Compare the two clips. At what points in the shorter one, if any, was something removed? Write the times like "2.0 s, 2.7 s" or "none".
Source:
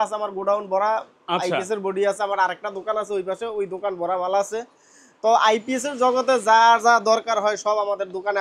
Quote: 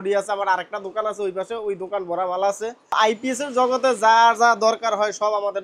2.9 s